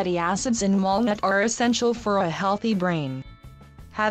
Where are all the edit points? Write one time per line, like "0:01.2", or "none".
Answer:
0:03.0